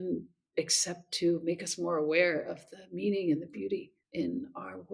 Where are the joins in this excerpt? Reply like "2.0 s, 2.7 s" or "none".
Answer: 4.0 s